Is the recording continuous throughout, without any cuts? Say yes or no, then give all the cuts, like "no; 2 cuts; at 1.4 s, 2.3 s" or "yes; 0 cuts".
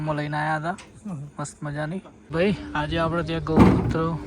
no; 1 cut; at 2.3 s